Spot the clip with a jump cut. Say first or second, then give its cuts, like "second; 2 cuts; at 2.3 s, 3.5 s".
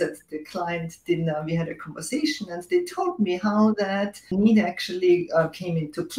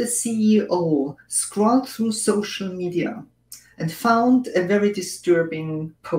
first; 1 cut; at 4.2 s